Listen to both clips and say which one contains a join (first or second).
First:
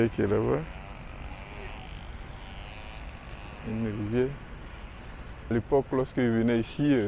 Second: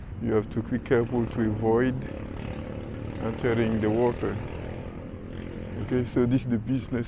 first